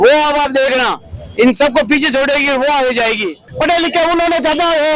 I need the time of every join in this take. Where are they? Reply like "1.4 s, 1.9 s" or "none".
3.5 s